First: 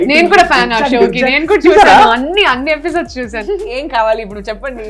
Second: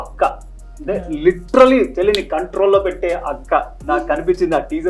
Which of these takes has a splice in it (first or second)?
first